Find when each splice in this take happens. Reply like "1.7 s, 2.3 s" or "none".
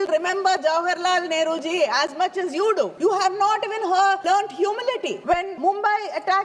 2.9 s, 4.2 s, 5.4 s